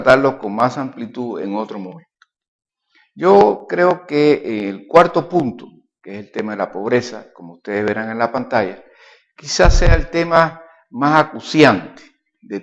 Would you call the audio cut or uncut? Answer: cut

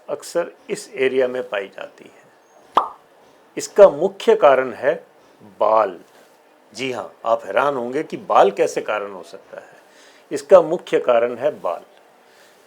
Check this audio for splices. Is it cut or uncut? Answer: uncut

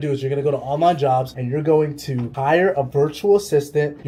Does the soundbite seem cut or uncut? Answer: uncut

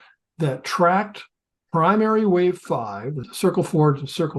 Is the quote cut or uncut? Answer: cut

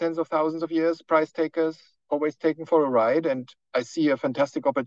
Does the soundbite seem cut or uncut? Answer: uncut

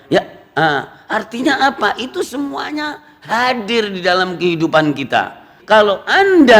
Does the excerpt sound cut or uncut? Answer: cut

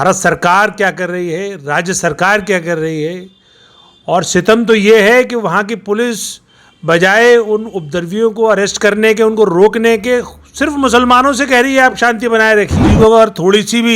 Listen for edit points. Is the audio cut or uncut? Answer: cut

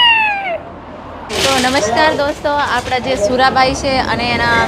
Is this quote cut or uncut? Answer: cut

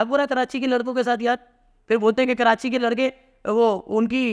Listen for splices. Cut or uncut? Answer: uncut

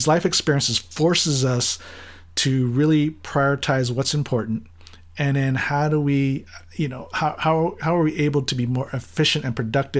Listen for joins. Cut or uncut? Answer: uncut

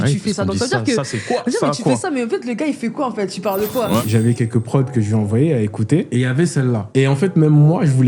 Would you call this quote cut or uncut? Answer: cut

